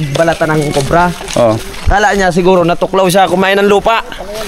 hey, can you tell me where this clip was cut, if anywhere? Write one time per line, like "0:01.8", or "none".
none